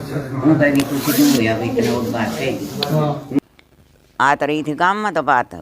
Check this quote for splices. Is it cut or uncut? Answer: cut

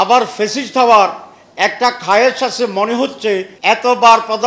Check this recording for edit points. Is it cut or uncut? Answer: cut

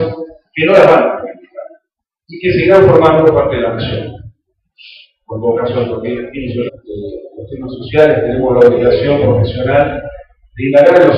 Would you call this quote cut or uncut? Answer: uncut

